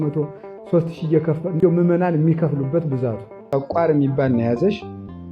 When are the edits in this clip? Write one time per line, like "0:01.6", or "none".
0:03.3